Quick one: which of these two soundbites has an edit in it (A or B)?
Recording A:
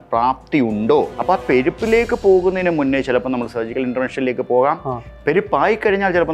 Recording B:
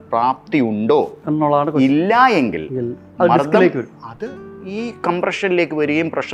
A